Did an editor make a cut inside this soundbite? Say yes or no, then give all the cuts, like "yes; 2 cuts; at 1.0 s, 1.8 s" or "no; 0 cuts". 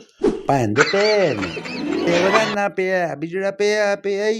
yes; 1 cut; at 2.0 s